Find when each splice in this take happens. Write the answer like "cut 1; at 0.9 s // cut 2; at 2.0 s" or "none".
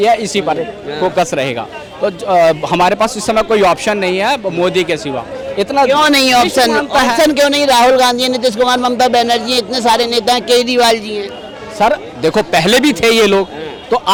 none